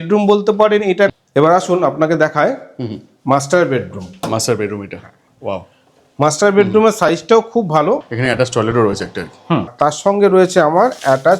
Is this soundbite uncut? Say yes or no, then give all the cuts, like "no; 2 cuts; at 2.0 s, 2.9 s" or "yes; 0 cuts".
no; 3 cuts; at 1.2 s, 8.1 s, 9.7 s